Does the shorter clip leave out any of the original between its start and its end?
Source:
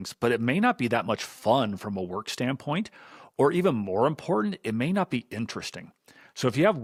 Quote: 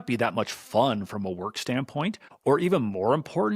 yes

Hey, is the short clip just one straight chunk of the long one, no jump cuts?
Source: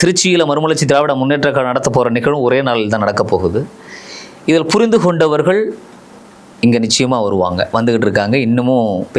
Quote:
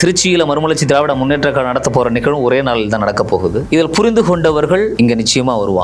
no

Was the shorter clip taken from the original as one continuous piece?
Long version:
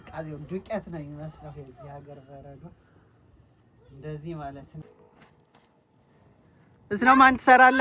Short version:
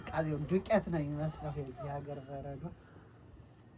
yes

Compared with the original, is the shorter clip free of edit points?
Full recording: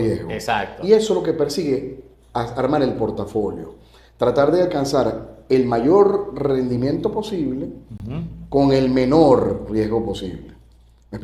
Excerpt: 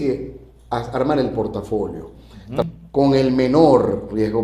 no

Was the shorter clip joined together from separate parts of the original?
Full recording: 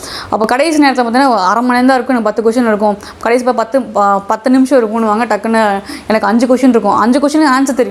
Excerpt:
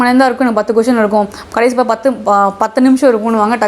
no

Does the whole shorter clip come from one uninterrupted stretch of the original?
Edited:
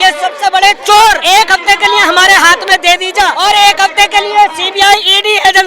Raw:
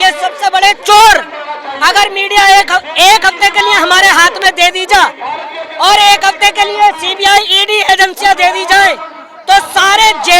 no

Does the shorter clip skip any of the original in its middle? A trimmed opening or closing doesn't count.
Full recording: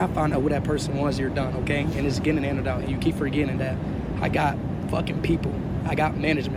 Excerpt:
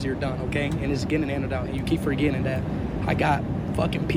no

